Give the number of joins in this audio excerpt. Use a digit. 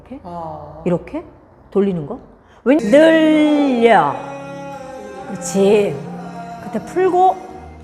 1